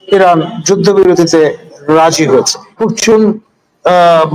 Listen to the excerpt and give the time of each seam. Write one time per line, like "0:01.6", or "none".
0:02.8